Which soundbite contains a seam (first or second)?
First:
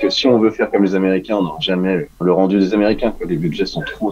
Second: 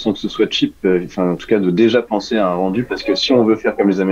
first